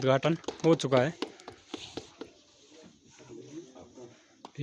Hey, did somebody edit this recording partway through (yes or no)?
no